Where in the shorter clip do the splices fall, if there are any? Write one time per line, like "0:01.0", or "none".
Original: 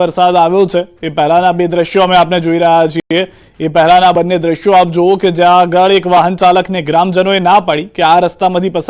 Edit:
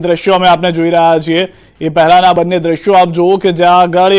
0:01.3